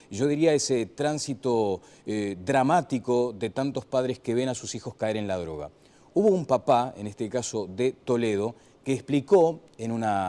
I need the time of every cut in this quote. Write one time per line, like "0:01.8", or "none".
0:02.2